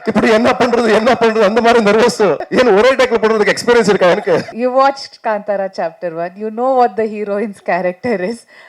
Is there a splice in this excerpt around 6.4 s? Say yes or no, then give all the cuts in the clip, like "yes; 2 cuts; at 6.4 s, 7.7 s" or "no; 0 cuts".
no; 2 cuts; at 2.4 s, 4.5 s